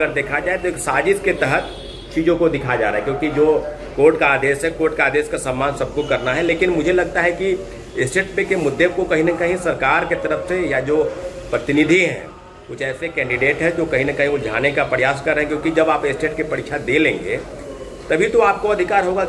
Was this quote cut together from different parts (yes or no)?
no